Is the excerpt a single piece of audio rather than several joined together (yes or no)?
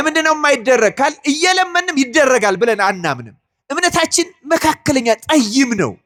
yes